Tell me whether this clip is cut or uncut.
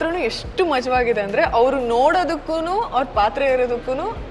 uncut